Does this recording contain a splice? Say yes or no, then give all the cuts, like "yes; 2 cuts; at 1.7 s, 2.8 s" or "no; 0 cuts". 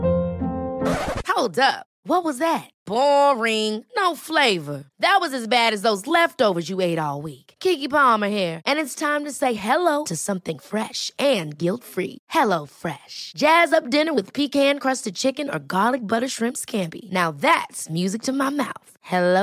no; 0 cuts